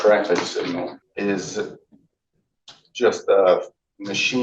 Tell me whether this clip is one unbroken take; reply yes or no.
no